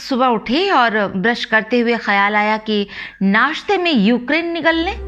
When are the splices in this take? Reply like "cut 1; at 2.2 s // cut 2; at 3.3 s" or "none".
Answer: none